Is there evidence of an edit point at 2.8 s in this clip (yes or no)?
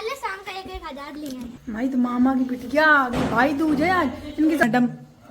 no